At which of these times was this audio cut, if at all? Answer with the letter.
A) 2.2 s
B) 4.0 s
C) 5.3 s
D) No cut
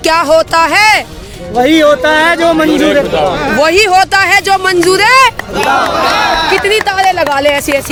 D